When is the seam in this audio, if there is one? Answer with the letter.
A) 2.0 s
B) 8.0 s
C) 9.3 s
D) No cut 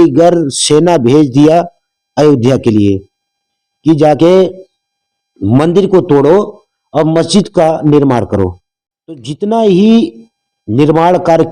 C